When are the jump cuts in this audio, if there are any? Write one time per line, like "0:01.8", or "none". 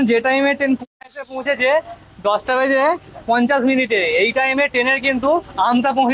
none